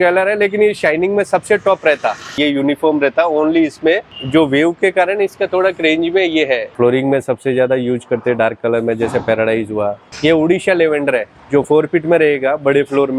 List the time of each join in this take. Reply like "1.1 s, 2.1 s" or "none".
2.3 s, 4.1 s, 6.7 s, 10.0 s